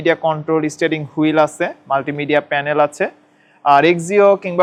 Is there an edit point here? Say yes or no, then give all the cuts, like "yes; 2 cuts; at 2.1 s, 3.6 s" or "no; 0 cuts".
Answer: no; 0 cuts